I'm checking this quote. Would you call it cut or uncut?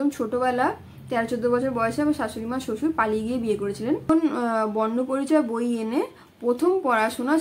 cut